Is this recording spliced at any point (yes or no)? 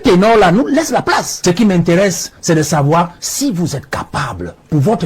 yes